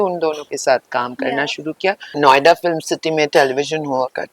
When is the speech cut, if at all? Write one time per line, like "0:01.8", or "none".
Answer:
0:02.1